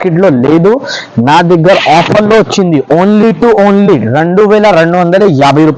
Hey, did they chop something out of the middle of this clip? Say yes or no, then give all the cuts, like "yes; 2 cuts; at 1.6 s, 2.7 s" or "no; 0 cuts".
no; 0 cuts